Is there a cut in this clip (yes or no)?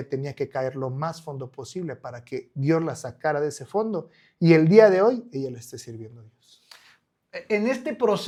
no